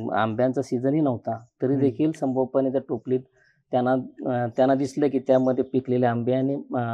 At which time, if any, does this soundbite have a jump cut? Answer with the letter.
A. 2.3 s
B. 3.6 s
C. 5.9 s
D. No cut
D